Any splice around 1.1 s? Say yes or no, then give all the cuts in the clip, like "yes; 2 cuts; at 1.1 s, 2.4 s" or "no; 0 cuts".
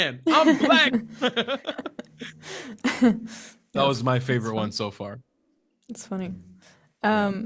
no; 0 cuts